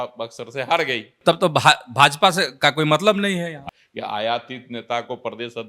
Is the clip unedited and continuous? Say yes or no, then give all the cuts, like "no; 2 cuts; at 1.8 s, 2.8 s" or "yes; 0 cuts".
no; 2 cuts; at 1.1 s, 3.7 s